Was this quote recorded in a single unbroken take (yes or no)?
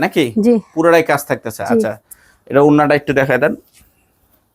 yes